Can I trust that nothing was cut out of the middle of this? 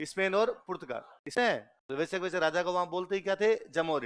no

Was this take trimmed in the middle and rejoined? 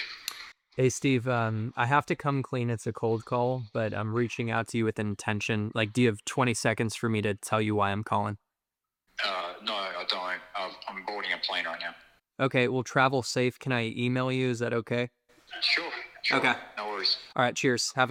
no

